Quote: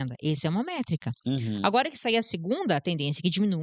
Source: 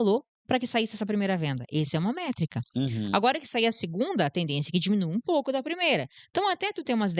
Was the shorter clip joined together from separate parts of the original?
no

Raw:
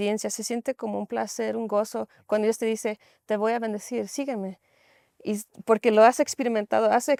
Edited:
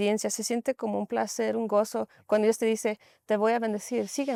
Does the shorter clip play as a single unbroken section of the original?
yes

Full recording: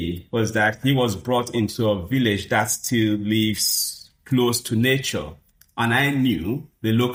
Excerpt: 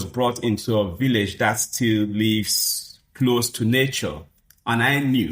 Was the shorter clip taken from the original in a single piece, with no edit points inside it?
yes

